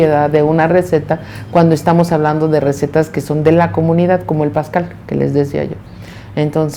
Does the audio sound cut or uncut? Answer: uncut